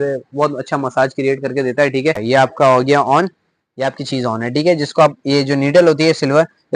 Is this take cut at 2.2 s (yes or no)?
yes